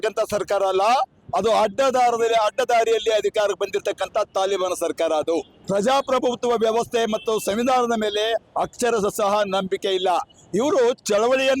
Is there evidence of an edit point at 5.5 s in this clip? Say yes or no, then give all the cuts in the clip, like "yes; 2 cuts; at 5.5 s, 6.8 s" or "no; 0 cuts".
yes; 1 cut; at 5.5 s